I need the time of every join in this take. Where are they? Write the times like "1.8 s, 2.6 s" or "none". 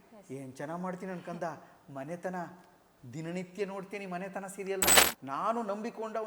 5.1 s